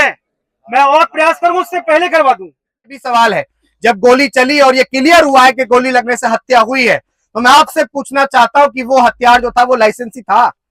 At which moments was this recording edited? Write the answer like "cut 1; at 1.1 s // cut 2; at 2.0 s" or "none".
cut 1; at 3.0 s